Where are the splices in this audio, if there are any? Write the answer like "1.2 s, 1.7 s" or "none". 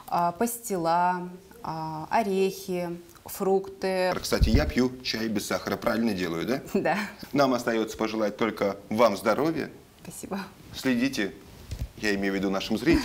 4.1 s, 7.2 s